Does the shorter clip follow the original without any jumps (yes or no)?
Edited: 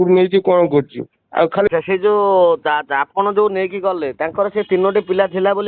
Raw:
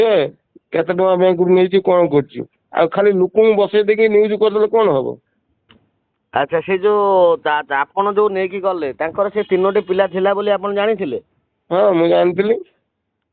no